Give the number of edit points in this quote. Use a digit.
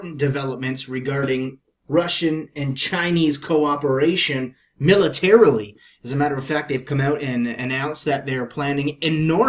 1